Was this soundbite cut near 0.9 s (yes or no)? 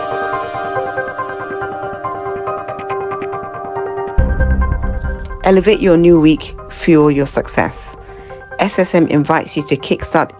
yes